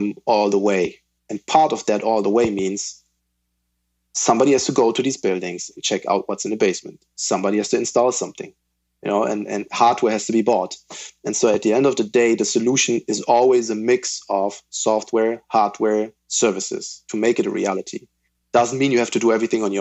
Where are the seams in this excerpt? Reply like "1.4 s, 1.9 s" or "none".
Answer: none